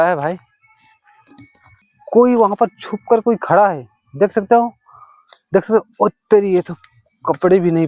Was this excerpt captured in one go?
no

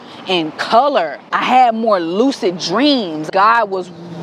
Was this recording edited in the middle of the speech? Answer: yes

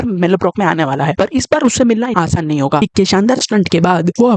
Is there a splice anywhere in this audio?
yes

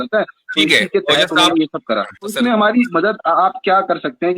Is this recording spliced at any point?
yes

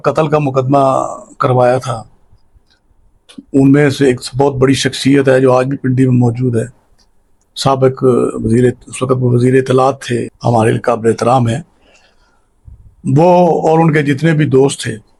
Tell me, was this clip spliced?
no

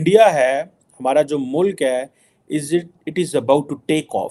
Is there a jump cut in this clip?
no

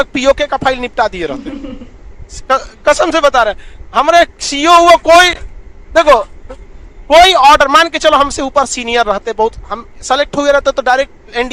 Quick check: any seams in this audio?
no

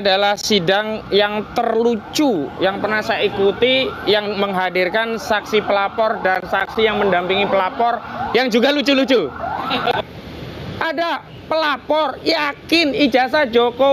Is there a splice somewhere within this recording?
yes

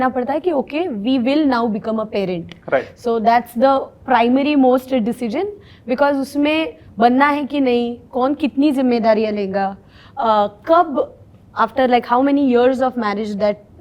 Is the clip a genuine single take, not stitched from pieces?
yes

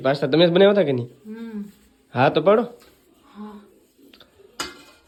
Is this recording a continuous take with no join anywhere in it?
yes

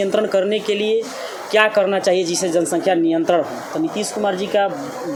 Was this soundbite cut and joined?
no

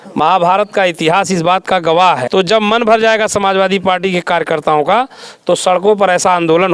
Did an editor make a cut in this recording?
yes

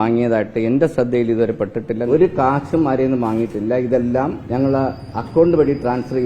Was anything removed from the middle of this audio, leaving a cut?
yes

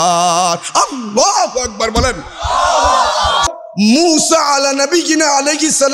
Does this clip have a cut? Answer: yes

